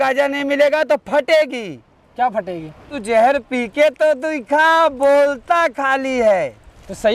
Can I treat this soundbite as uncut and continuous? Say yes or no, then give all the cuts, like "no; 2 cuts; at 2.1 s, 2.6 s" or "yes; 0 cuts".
no; 1 cut; at 3.0 s